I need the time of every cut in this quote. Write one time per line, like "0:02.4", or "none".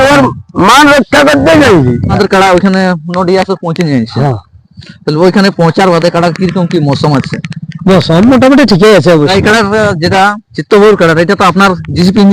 0:02.2
0:09.3